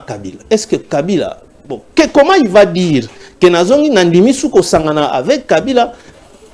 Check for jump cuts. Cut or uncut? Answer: uncut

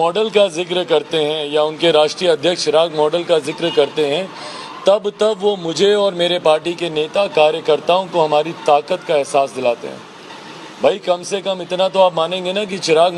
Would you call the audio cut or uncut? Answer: uncut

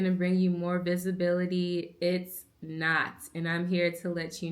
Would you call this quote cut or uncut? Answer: uncut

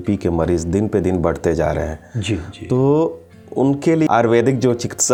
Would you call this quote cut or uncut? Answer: uncut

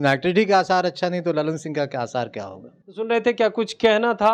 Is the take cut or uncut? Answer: uncut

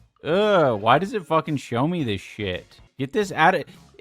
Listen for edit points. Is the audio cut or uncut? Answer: cut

